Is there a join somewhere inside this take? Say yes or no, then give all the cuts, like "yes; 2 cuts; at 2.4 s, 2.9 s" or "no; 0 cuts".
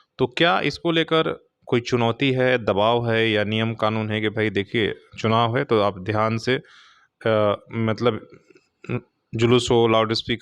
no; 0 cuts